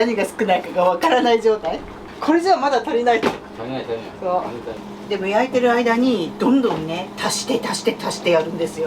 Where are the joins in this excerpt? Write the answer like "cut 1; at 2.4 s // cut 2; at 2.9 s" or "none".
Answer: cut 1; at 4.8 s